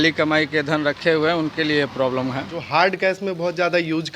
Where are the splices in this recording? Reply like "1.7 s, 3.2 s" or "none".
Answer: 2.5 s